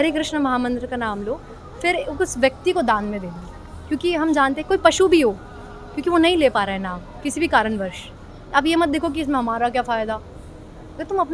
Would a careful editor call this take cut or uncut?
uncut